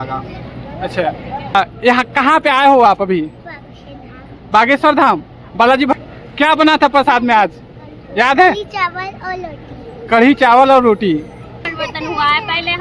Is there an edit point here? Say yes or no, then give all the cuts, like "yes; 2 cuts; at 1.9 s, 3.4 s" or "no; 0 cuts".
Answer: yes; 3 cuts; at 1.5 s, 5.9 s, 11.6 s